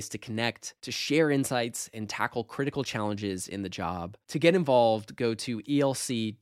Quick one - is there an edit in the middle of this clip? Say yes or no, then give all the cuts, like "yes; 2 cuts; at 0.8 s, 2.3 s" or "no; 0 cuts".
no; 0 cuts